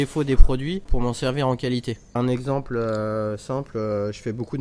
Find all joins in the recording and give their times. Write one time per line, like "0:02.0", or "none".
0:00.9
0:02.2